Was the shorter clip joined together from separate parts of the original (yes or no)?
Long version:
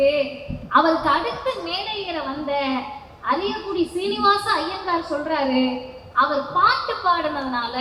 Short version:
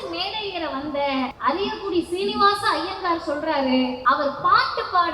yes